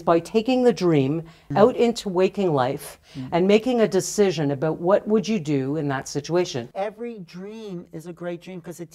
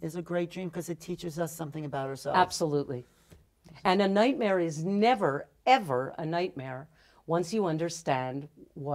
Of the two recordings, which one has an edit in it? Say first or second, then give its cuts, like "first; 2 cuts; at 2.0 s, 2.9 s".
first; 2 cuts; at 1.4 s, 6.6 s